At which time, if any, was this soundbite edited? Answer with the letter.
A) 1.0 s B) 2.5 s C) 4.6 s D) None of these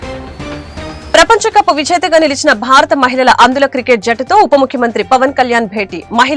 A